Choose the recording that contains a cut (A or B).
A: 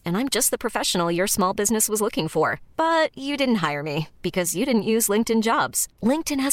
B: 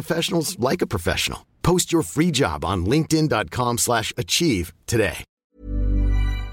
B